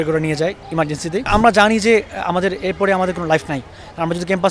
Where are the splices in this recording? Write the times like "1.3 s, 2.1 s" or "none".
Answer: 1.3 s